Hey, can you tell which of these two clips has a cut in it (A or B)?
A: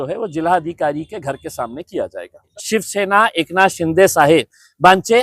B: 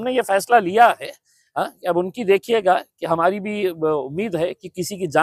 A